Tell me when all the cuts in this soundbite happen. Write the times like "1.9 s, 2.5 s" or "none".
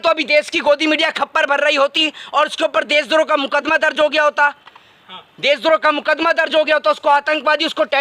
none